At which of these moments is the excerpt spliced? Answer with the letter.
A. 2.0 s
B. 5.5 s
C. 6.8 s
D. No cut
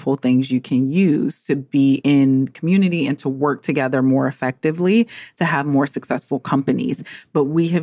A